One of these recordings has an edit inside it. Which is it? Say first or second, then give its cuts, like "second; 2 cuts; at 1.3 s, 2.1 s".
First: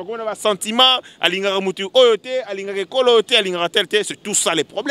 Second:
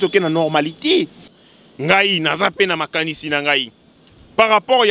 second; 1 cut; at 1.4 s